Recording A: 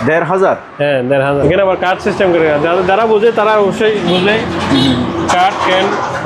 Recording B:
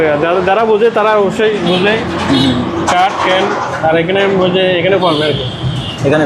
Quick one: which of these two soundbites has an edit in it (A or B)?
A